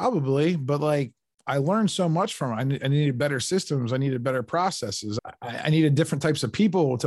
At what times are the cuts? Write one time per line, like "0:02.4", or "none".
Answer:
0:05.2